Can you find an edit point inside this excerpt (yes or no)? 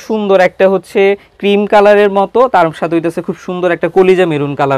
no